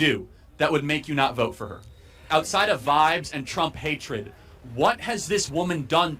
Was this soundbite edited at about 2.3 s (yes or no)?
yes